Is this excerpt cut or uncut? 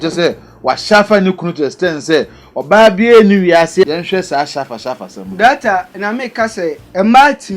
cut